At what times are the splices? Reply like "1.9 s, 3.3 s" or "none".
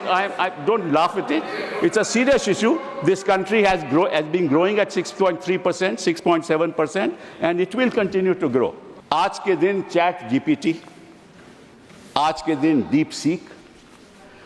8.9 s